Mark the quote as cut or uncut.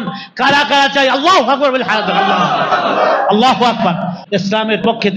cut